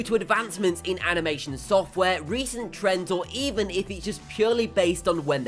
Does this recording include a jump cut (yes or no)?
yes